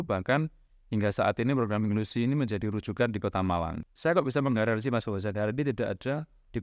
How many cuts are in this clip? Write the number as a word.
one